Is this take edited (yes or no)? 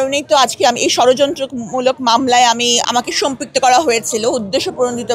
yes